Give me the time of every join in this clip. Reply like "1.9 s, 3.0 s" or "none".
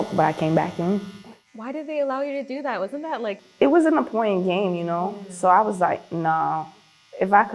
3.4 s